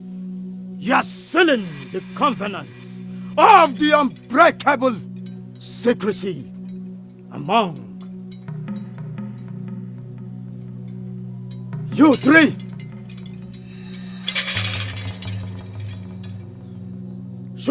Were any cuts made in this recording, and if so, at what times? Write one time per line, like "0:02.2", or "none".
none